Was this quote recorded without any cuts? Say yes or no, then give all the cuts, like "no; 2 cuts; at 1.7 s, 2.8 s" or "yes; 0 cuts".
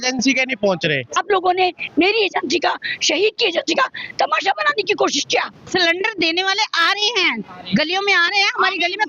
no; 2 cuts; at 1.2 s, 5.6 s